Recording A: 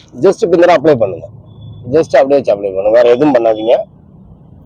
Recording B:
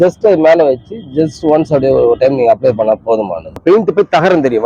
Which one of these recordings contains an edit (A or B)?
B